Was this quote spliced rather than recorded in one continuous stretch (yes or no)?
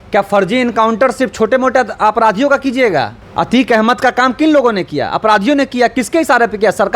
yes